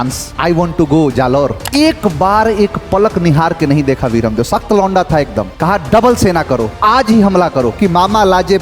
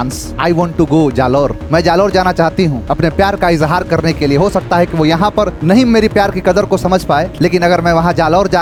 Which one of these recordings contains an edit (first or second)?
first